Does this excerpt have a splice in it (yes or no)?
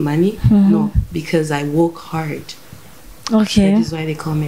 no